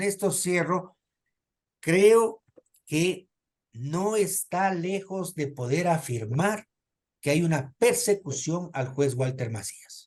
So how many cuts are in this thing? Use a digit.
0